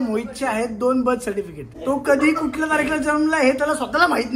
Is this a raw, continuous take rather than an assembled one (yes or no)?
no